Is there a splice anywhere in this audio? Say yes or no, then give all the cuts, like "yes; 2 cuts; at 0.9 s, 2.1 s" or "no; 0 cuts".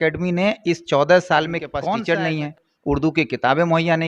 yes; 1 cut; at 1.8 s